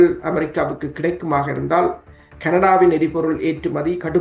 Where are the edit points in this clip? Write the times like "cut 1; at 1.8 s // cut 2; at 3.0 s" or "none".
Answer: none